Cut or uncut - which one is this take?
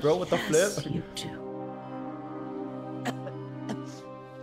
uncut